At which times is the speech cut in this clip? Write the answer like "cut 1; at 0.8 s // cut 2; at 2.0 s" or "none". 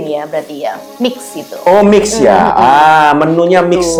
none